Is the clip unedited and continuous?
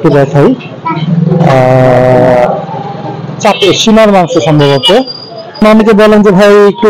no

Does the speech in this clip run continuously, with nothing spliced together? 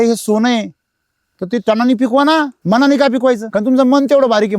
no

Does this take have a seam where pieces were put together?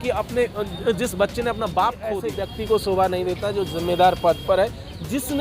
yes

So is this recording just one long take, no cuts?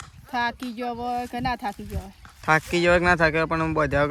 yes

